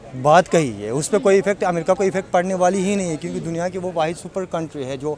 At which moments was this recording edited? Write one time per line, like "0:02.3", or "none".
none